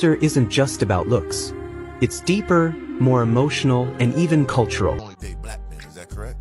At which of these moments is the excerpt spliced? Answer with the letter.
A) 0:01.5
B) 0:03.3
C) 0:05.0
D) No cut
C